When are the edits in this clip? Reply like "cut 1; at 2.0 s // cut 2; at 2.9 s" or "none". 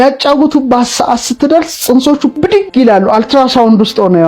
cut 1; at 2.5 s